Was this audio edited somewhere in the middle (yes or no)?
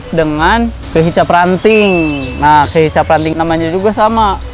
yes